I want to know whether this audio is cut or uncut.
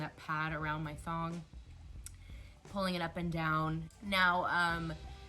cut